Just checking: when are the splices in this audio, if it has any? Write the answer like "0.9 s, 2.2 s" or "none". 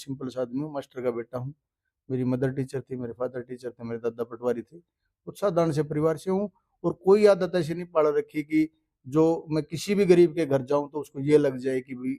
none